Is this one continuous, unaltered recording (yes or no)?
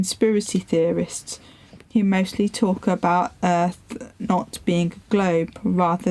yes